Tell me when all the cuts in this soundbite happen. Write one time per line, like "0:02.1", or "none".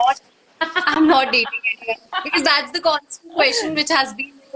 none